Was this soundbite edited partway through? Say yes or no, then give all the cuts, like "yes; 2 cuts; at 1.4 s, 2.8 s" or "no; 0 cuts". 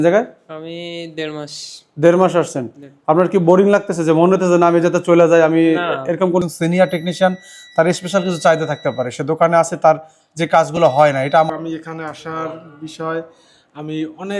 yes; 2 cuts; at 6.4 s, 11.5 s